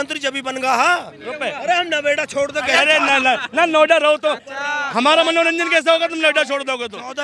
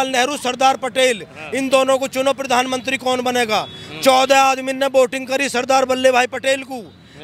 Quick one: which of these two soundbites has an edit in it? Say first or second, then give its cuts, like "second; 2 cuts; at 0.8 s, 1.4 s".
first; 1 cut; at 1.5 s